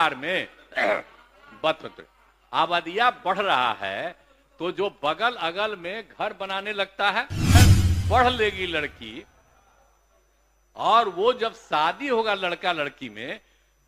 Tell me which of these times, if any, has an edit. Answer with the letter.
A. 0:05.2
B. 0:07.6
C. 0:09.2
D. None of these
B